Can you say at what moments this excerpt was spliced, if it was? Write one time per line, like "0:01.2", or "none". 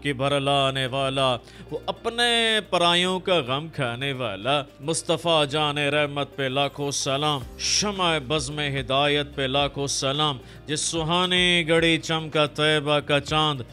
0:04.7